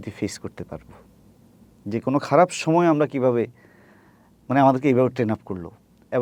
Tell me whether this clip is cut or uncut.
uncut